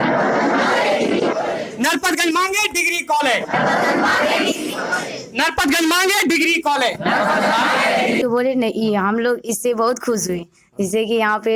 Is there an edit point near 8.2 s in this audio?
yes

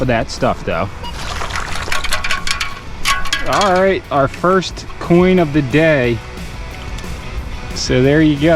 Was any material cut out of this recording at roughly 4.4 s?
no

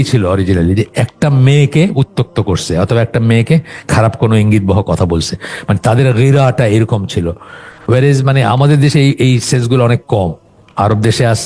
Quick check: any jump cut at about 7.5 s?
no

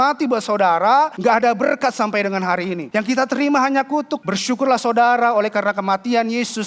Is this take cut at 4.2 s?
yes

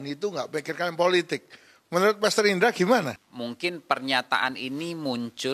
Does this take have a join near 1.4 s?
no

